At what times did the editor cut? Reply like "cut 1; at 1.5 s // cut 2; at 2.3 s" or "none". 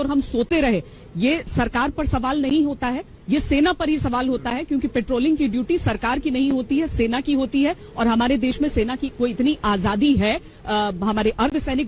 none